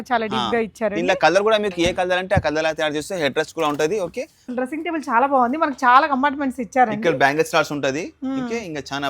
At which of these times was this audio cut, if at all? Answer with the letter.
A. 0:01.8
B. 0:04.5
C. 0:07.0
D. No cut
B